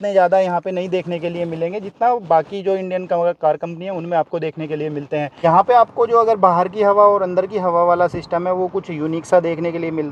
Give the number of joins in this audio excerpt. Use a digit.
1